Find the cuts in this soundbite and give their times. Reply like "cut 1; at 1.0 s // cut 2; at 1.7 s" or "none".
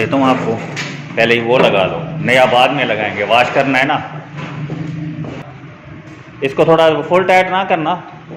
cut 1; at 5.4 s